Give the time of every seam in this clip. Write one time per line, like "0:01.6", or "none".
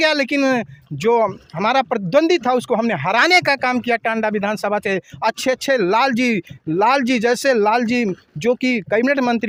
none